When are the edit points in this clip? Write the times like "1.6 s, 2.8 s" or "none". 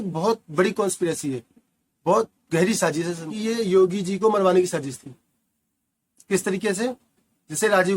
3.3 s